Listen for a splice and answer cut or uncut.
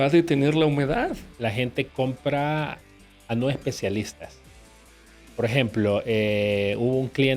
cut